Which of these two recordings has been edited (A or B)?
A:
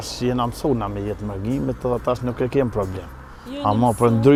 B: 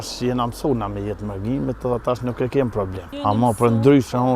B